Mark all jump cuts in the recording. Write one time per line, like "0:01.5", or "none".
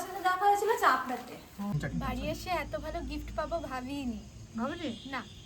0:01.6